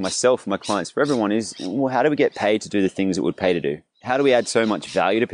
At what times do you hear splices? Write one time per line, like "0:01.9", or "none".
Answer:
0:03.9